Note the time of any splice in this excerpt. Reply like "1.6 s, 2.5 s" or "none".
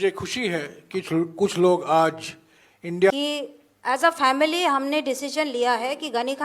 3.1 s